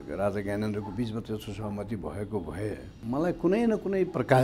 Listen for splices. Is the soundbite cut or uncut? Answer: cut